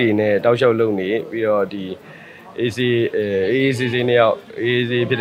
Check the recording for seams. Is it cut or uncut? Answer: uncut